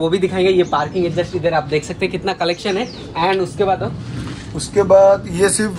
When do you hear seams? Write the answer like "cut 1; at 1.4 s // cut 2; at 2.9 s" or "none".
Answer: none